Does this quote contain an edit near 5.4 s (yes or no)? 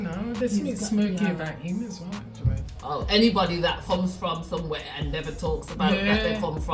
no